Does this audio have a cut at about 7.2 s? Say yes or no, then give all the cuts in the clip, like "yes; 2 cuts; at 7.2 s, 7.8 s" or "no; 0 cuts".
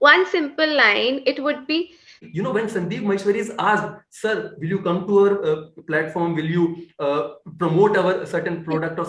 no; 1 cut; at 2.2 s